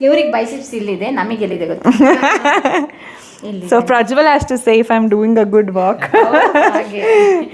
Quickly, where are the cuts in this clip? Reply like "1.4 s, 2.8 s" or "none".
none

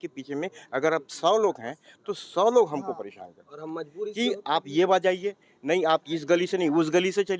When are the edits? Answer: none

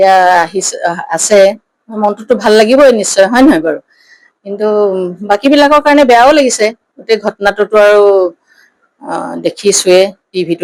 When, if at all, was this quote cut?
none

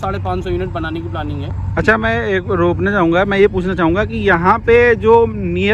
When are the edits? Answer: none

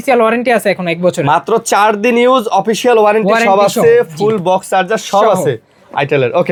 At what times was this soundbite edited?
none

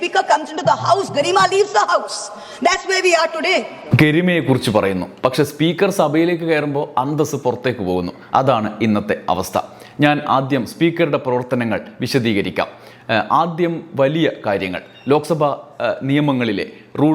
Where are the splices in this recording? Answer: none

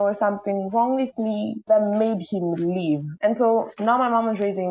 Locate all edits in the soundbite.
3.1 s

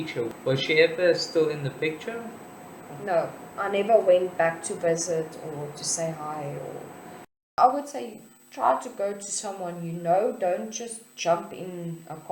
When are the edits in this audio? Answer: 7.5 s

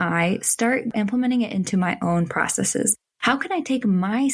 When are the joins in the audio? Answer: 0.9 s

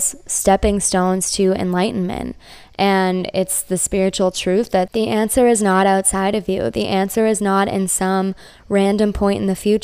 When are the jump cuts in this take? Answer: 4.9 s

